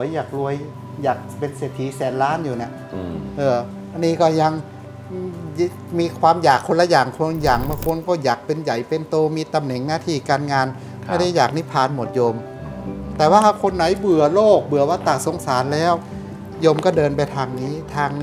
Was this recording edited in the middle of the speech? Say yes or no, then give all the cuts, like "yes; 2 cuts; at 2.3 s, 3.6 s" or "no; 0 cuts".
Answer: no; 0 cuts